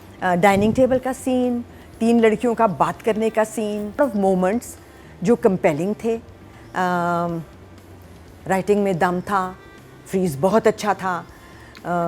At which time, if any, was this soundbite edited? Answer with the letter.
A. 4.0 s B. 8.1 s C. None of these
A